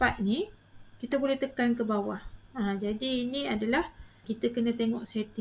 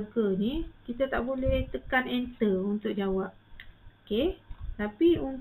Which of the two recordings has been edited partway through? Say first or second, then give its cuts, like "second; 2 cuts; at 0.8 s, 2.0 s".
first; 1 cut; at 4.3 s